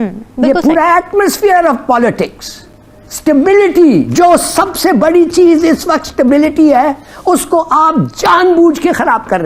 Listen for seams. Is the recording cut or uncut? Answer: uncut